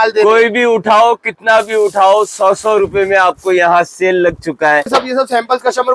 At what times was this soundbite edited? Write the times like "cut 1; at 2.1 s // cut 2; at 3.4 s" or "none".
cut 1; at 4.9 s